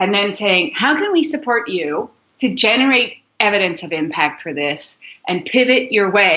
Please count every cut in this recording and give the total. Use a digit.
0